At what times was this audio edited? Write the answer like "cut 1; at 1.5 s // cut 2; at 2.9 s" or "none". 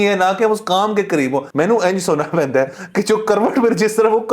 cut 1; at 1.5 s